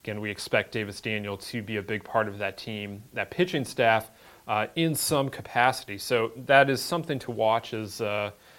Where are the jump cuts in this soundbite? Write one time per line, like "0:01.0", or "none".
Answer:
none